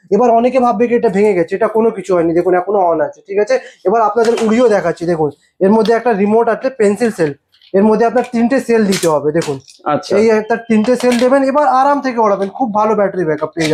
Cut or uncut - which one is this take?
uncut